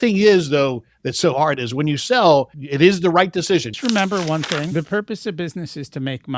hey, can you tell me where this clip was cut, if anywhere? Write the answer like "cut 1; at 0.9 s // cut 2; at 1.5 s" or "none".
cut 1; at 2.6 s // cut 2; at 3.7 s